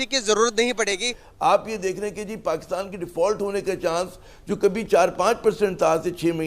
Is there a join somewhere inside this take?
yes; 1 cut; at 1.2 s

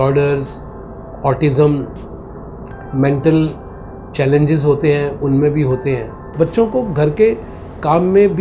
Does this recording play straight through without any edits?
no; 1 cut; at 6.3 s

